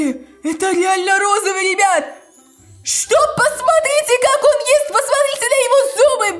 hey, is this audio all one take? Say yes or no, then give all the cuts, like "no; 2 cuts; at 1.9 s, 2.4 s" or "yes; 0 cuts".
yes; 0 cuts